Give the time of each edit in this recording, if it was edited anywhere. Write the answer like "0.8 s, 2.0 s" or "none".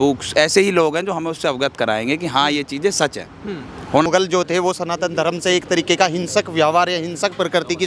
4.1 s